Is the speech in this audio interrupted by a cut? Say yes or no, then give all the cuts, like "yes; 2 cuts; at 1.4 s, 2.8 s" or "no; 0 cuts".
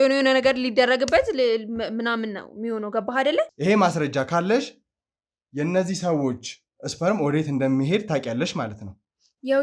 yes; 1 cut; at 3.5 s